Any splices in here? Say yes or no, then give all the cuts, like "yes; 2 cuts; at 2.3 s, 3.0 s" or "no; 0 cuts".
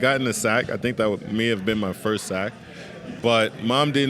yes; 1 cut; at 3.2 s